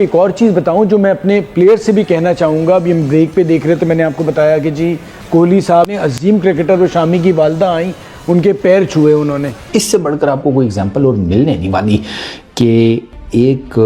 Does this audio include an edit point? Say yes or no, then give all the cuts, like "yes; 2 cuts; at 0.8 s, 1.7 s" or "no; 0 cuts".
yes; 1 cut; at 9.5 s